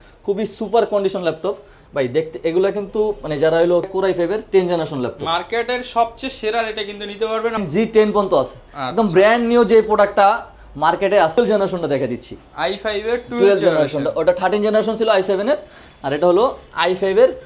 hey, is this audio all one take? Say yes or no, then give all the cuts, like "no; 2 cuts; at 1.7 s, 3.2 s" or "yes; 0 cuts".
no; 3 cuts; at 3.9 s, 7.6 s, 11.4 s